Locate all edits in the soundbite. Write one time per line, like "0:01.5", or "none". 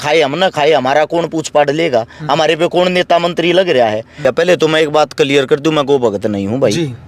0:04.2